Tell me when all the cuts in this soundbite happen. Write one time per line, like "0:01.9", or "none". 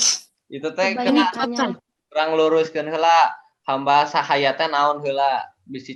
none